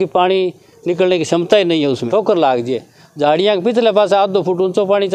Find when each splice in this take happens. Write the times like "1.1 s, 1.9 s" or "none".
2.0 s